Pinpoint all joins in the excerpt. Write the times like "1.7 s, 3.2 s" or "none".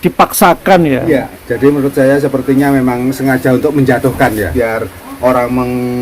1.4 s, 5.0 s